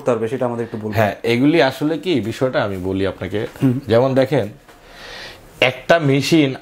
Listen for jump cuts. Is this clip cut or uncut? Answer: uncut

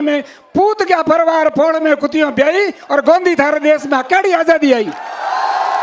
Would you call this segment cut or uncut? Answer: uncut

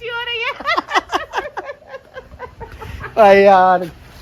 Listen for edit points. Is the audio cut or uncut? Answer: uncut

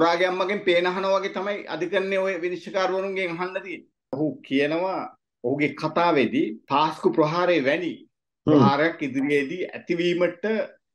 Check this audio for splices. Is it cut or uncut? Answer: cut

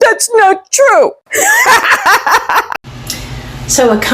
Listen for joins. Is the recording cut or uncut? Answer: cut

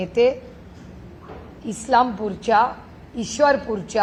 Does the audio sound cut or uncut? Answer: uncut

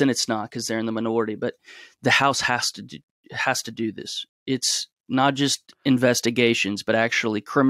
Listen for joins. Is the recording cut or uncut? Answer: uncut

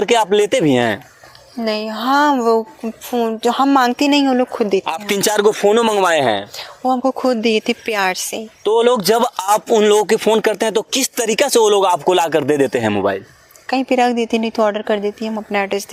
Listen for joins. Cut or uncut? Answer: uncut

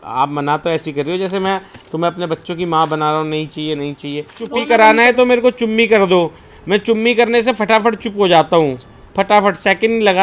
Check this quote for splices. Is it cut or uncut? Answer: cut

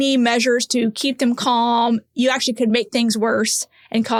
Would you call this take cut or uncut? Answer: uncut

